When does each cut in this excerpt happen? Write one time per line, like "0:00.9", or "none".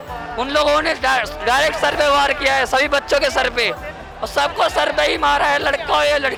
none